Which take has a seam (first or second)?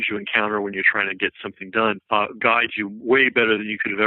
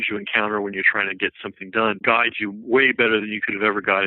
second